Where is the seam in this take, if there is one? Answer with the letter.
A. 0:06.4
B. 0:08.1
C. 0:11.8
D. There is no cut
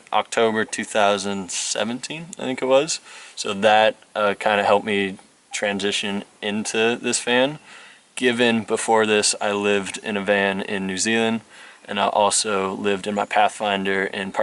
D